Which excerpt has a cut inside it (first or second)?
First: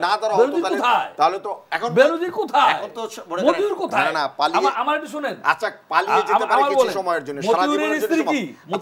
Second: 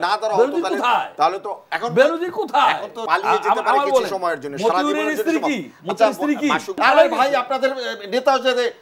second